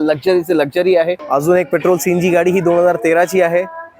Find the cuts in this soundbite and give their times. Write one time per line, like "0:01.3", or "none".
0:01.2